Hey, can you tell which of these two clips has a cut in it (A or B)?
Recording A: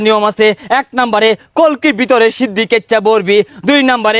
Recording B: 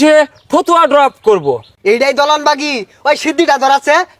B